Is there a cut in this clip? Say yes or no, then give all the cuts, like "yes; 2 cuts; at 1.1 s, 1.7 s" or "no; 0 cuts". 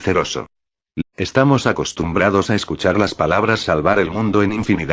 no; 0 cuts